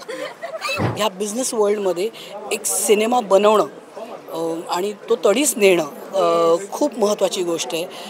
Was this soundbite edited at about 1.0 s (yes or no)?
yes